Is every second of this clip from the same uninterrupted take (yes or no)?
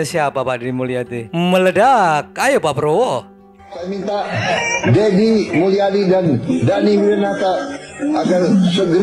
yes